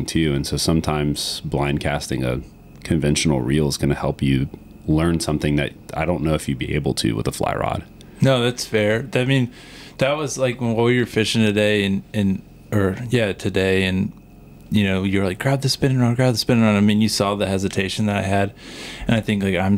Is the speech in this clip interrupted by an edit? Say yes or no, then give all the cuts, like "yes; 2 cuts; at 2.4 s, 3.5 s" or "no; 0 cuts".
no; 0 cuts